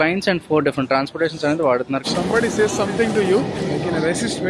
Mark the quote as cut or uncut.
cut